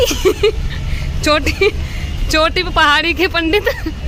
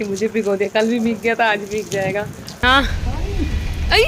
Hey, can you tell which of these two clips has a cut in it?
second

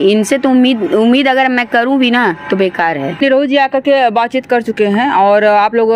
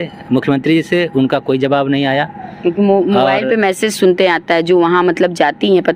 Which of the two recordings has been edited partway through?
first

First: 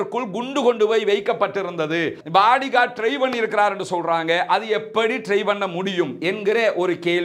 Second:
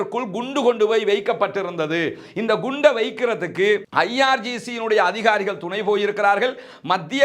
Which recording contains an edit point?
first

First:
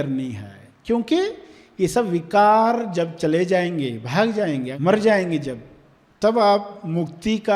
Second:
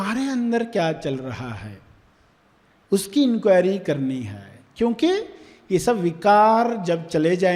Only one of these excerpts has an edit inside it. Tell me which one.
first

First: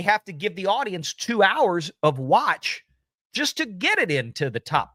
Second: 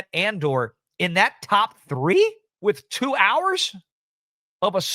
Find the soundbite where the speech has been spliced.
second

